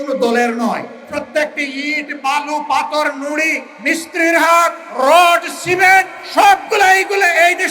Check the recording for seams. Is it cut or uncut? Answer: cut